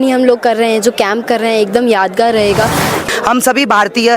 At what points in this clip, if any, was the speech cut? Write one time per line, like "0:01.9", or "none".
0:03.0